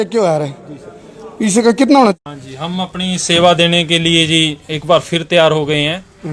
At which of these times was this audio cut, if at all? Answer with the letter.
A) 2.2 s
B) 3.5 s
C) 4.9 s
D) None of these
A